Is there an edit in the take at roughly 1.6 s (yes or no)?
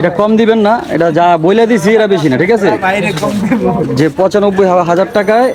no